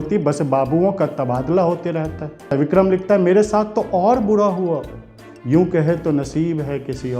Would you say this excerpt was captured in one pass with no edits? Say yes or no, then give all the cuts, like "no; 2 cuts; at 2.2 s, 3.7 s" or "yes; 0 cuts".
no; 1 cut; at 2.5 s